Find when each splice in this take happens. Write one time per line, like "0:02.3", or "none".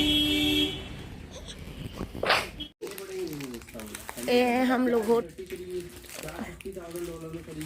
0:02.8
0:05.3

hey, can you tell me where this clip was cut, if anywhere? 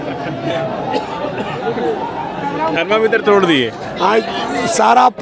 none

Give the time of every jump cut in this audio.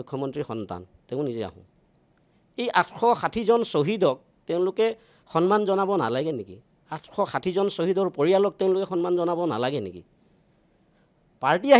none

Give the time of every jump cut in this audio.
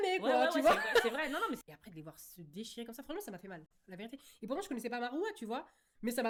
none

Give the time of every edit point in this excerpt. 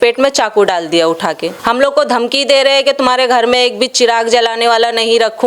0:01.5

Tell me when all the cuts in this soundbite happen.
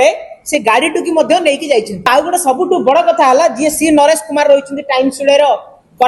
0:02.1

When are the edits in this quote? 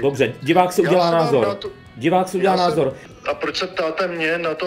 0:03.0

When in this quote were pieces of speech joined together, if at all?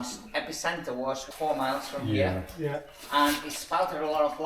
0:01.2

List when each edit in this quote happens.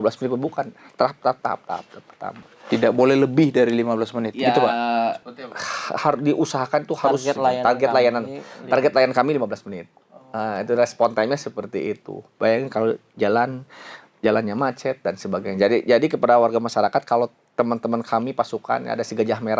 none

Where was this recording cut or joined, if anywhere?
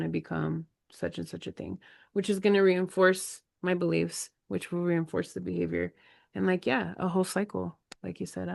none

